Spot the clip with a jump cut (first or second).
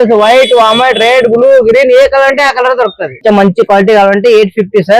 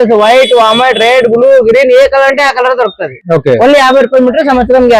first